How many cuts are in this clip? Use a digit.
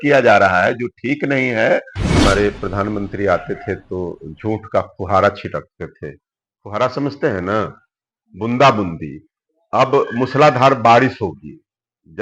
1